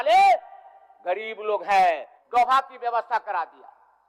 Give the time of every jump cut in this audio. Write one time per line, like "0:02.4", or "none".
0:02.1